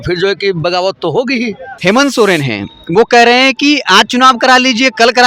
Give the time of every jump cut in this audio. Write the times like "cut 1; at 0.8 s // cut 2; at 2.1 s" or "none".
cut 1; at 1.6 s